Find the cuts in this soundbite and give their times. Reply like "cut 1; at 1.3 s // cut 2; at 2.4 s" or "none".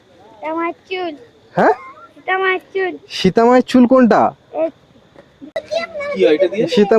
cut 1; at 5.6 s